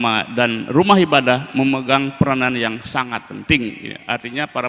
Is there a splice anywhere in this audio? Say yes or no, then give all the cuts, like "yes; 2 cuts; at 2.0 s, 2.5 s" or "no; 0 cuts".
no; 0 cuts